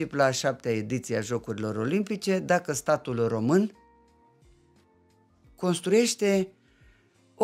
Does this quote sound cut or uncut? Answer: uncut